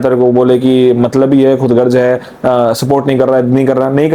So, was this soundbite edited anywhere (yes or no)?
no